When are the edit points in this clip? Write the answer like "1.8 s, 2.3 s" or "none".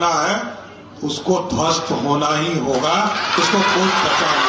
none